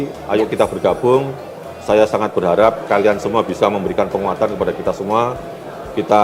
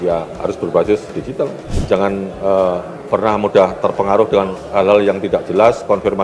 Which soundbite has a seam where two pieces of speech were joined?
second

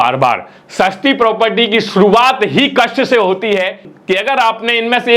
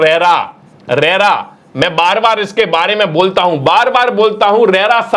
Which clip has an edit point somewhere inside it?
first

